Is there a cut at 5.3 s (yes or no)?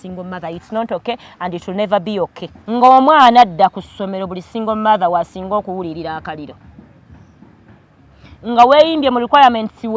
no